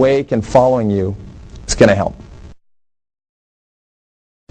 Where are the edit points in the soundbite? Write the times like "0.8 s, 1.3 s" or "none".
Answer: none